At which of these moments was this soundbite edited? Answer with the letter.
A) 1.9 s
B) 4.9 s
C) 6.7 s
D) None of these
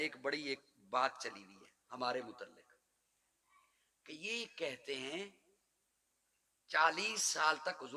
D